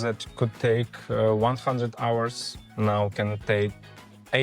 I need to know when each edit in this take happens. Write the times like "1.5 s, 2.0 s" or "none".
none